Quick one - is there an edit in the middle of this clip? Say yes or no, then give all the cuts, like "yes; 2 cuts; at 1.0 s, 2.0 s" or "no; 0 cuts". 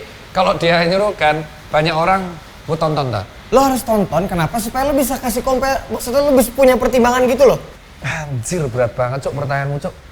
yes; 1 cut; at 7.7 s